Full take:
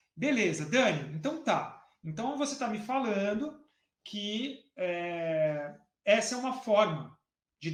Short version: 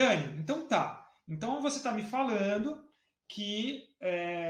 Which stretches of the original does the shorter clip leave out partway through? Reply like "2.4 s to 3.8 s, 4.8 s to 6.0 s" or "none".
none